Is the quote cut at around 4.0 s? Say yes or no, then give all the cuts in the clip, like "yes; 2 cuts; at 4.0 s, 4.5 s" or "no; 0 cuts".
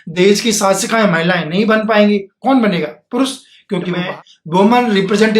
yes; 1 cut; at 4.0 s